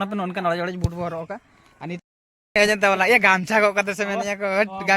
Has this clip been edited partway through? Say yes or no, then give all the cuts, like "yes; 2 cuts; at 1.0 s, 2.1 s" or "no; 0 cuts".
yes; 1 cut; at 2.0 s